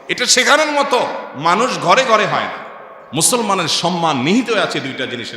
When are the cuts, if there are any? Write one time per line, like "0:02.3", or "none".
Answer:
0:03.0